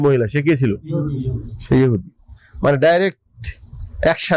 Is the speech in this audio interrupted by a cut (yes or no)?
no